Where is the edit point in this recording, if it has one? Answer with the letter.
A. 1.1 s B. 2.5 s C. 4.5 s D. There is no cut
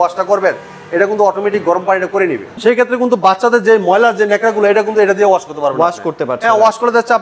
B